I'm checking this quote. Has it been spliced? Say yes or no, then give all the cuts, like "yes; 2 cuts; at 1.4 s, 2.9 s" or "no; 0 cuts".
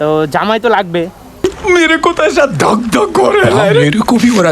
yes; 1 cut; at 1.3 s